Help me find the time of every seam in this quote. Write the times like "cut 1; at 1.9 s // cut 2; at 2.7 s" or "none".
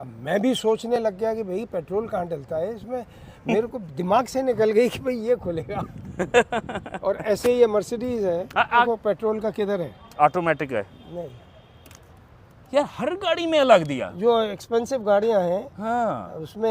cut 1; at 8.9 s